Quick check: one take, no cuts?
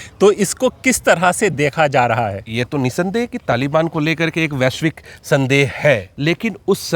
no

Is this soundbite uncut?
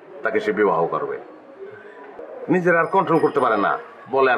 no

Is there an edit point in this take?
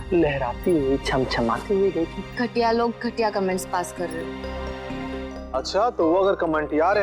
yes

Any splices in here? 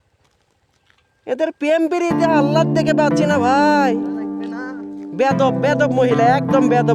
no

